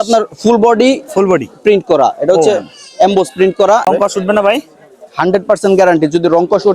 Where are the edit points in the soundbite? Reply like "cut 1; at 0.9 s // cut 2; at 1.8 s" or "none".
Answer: cut 1; at 3.9 s

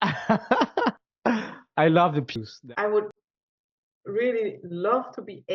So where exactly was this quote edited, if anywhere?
cut 1; at 2.3 s

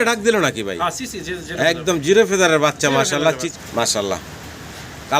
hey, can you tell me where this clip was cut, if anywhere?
cut 1; at 3.5 s

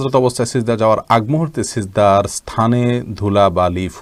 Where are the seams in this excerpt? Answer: none

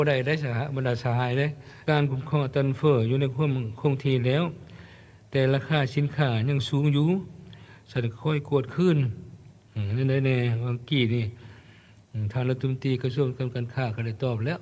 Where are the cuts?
cut 1; at 1.7 s

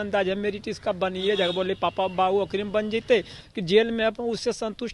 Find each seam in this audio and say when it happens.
cut 1; at 3.4 s

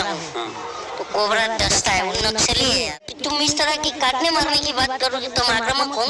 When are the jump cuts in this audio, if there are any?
cut 1; at 3.0 s

